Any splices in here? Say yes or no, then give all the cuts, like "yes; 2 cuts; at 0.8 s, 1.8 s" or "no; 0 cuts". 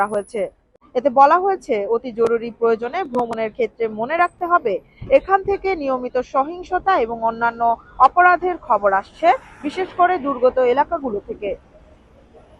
no; 0 cuts